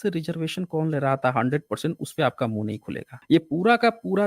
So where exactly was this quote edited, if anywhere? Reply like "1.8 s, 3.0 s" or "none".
none